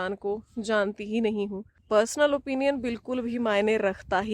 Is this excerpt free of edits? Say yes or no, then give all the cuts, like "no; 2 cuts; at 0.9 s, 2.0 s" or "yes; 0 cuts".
no; 1 cut; at 1.7 s